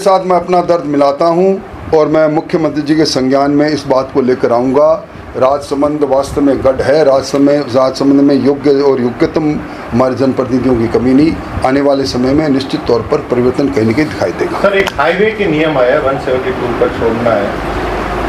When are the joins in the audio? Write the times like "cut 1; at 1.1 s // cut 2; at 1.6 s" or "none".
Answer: none